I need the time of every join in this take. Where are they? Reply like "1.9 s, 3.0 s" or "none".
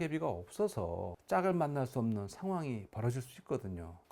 1.1 s